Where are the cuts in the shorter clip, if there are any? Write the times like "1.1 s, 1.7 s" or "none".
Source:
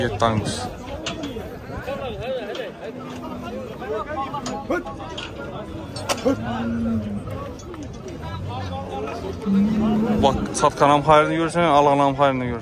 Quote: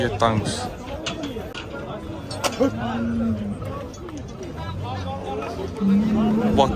1.6 s